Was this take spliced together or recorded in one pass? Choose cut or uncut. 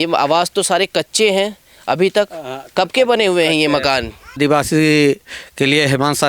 cut